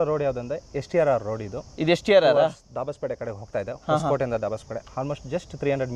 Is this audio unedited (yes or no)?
yes